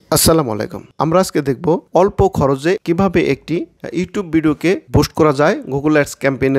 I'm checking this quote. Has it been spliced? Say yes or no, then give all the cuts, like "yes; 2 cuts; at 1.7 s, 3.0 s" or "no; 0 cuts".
no; 0 cuts